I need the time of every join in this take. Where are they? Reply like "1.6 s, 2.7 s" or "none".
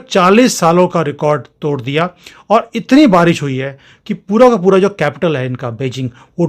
none